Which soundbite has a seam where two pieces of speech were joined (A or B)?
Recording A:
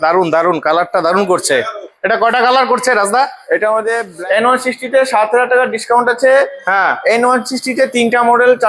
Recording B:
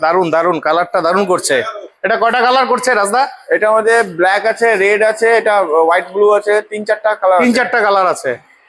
A